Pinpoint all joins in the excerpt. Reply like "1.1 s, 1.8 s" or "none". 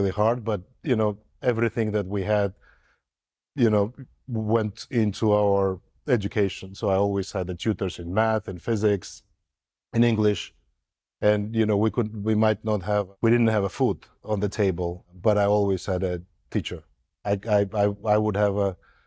none